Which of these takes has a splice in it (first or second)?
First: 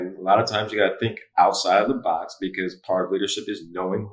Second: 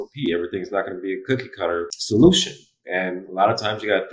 second